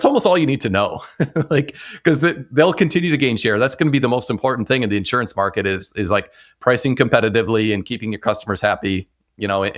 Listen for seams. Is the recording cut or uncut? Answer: uncut